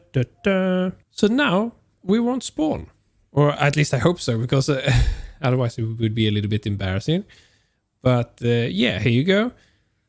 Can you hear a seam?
yes; 1 cut; at 1.0 s

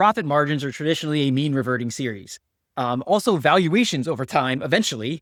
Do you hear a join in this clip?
no; 0 cuts

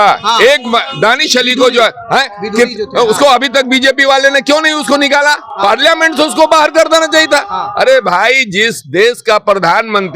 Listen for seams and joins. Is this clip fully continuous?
yes; 0 cuts

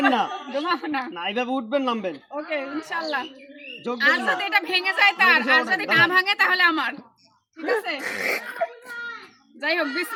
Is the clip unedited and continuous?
yes; 0 cuts

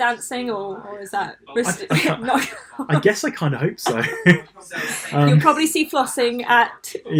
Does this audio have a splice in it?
no; 0 cuts

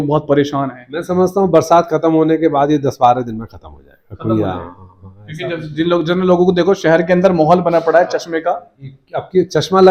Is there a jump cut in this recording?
no; 0 cuts

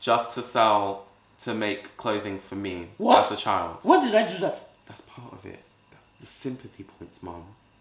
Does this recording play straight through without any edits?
no; 1 cut; at 2.9 s

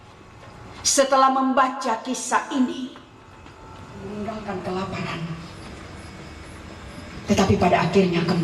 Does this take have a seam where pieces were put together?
yes; 1 cut; at 4.1 s

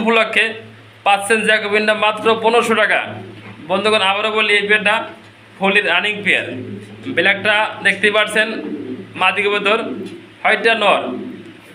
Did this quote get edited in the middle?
no; 0 cuts

